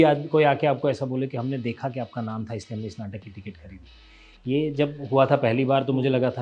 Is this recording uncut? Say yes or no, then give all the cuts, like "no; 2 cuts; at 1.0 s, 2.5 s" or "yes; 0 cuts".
yes; 0 cuts